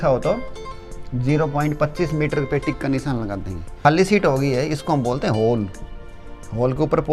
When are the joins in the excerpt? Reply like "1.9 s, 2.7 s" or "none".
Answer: 3.8 s